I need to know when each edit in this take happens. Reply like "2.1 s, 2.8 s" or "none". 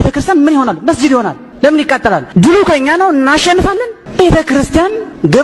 2.3 s

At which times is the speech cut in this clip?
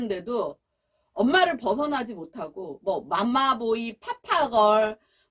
none

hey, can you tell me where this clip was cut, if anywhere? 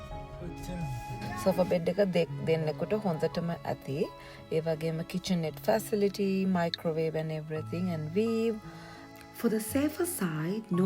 1.3 s

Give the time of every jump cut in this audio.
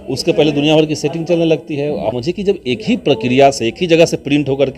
2.2 s

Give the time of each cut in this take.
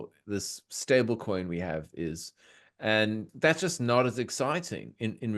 3.3 s

